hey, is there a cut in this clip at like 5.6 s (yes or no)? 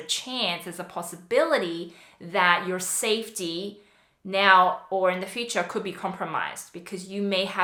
no